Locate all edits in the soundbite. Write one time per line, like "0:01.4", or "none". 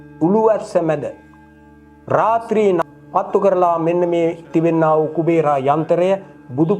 0:02.8